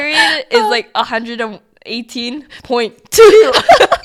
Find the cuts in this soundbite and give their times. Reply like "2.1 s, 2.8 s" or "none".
none